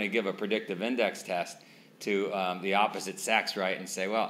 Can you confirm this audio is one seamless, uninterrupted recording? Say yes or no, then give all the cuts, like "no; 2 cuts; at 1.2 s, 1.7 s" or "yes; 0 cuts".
yes; 0 cuts